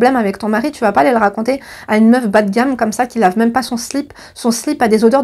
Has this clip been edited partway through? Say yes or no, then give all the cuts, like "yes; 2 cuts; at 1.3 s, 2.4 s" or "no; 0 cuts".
no; 0 cuts